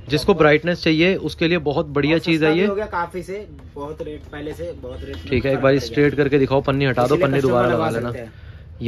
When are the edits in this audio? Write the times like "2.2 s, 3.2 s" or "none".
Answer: none